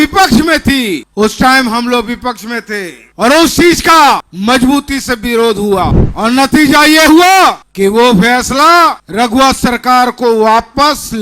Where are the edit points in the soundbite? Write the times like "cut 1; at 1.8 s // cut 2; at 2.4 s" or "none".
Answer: cut 1; at 1.1 s // cut 2; at 3.0 s // cut 3; at 4.3 s // cut 4; at 6.0 s // cut 5; at 7.7 s // cut 6; at 9.0 s